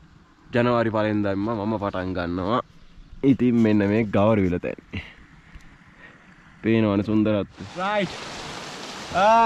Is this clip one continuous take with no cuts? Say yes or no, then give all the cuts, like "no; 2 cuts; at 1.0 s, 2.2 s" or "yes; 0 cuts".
no; 1 cut; at 7.7 s